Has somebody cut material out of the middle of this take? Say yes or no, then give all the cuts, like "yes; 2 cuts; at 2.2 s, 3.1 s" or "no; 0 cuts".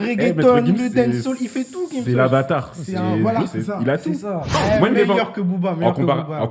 yes; 1 cut; at 4.5 s